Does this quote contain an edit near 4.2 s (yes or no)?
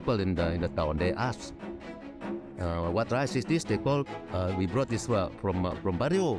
yes